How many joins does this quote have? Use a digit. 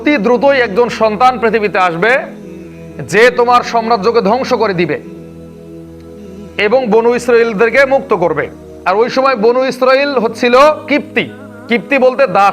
2